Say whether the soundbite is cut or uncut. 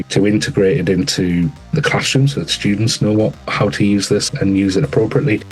cut